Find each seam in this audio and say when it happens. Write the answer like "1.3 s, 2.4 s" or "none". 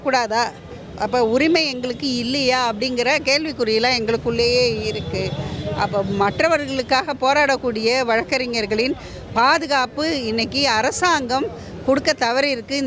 none